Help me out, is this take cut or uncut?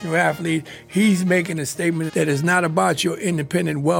cut